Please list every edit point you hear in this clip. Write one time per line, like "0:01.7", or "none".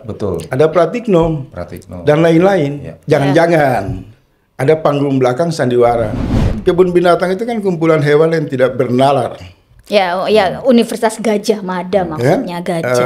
0:06.5